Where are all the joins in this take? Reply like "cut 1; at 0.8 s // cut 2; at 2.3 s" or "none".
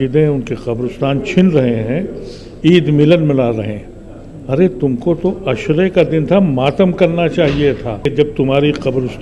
cut 1; at 8.1 s